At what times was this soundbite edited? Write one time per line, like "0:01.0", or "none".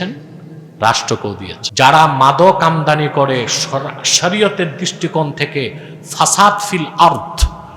0:01.6